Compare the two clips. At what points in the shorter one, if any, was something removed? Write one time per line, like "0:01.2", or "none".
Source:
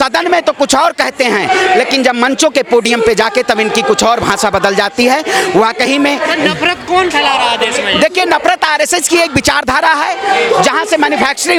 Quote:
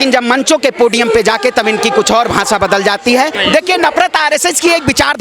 0:03.3